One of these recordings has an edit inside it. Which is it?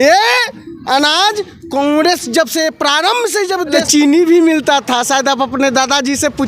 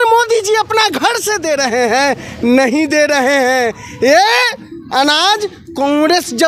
first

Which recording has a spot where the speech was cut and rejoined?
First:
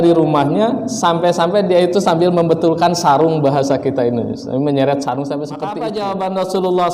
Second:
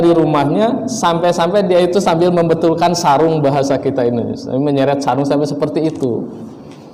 first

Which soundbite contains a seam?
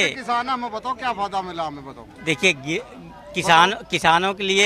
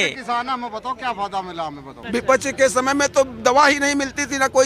second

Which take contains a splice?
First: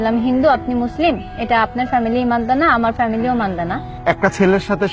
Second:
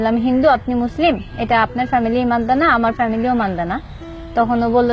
first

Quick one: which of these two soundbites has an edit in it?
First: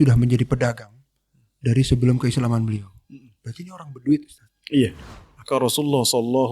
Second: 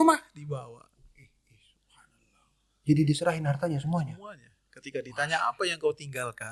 first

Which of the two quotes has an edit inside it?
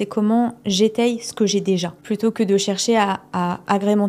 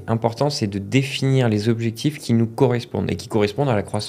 first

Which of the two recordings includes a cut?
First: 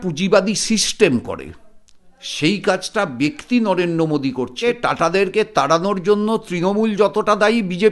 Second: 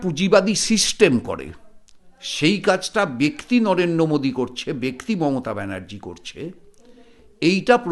first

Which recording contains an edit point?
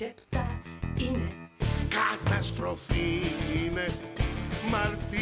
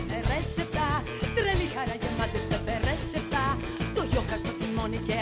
first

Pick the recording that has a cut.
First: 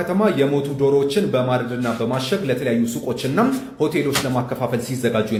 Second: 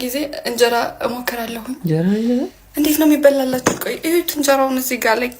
second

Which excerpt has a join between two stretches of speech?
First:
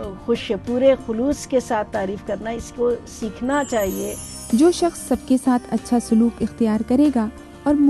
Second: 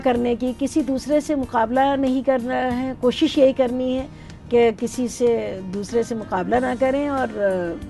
first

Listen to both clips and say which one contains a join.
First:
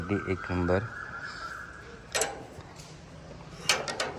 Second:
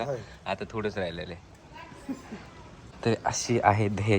second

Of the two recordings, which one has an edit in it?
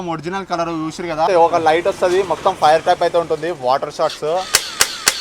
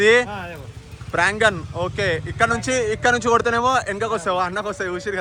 first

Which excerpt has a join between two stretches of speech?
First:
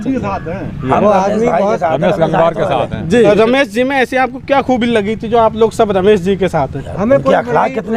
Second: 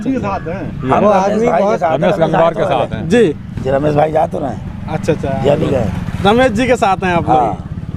first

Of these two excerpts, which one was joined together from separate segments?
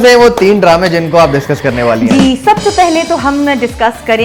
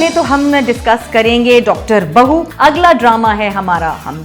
second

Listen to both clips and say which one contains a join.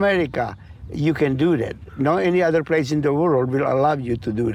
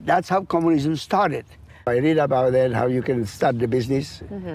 second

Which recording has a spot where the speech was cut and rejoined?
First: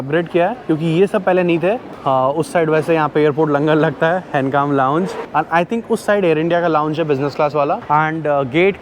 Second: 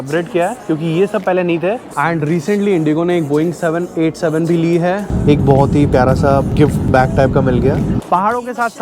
second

